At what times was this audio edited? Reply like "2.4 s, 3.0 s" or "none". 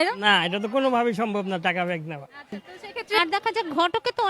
3.2 s